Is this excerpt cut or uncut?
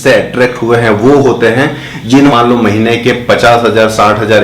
cut